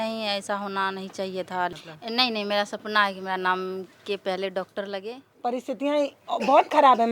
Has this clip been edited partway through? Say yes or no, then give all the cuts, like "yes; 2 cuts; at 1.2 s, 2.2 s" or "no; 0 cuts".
yes; 2 cuts; at 1.8 s, 5.2 s